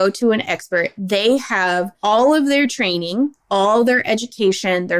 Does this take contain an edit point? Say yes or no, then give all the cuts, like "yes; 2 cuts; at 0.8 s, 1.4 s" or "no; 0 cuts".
yes; 1 cut; at 1.9 s